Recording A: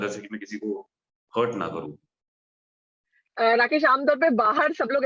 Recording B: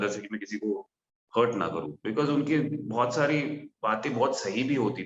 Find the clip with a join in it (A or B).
B